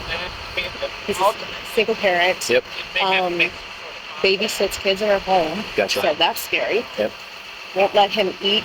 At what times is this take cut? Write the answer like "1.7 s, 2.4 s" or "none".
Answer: none

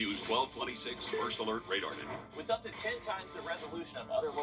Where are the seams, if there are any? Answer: none

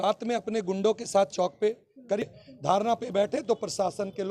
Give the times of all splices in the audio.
2.3 s

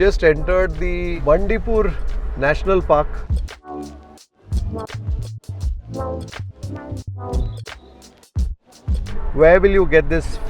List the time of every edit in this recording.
none

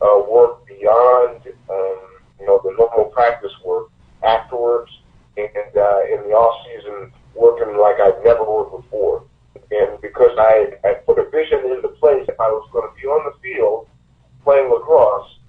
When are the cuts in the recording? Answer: 9.6 s, 10.8 s, 12.3 s

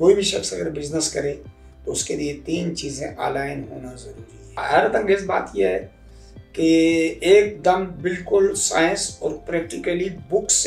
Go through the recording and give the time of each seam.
4.5 s

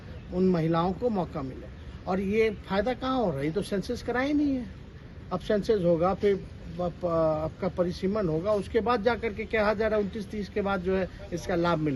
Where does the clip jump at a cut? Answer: none

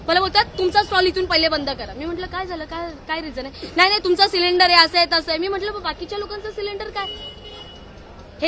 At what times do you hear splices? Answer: none

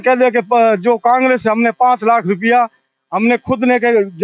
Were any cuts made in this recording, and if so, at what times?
none

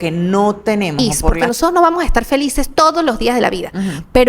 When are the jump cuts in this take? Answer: 1.2 s

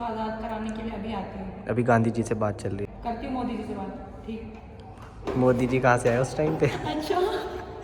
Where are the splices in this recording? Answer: 2.8 s

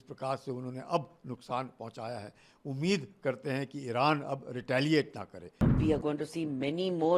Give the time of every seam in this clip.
5.7 s

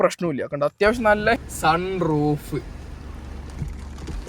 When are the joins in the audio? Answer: 1.4 s

